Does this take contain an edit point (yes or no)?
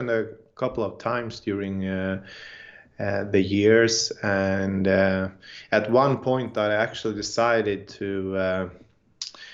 no